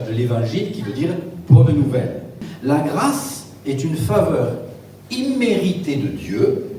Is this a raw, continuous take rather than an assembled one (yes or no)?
no